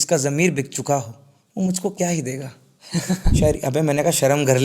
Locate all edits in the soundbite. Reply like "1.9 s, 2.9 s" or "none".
3.4 s